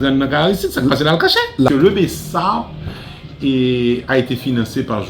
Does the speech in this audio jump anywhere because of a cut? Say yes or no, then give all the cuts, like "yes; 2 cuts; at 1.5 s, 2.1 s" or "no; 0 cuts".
yes; 1 cut; at 1.5 s